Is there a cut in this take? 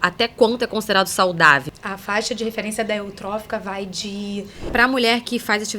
yes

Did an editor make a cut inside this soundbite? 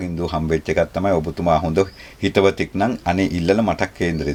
no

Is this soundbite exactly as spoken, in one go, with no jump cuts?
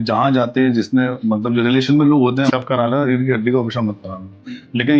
no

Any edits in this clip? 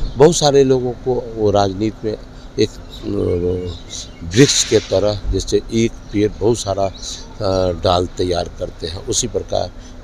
no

